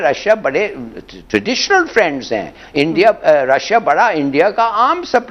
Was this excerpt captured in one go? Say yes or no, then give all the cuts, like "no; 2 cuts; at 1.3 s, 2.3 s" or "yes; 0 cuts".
yes; 0 cuts